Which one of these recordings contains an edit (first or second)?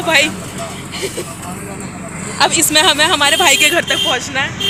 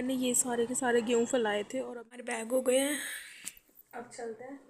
second